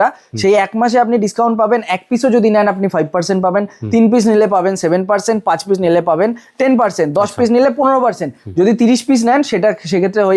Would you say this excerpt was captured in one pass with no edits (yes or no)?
yes